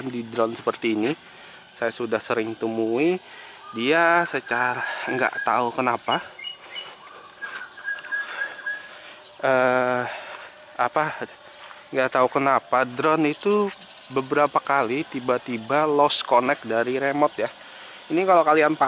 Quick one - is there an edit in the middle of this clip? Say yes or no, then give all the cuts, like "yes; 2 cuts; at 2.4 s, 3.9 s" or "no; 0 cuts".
no; 0 cuts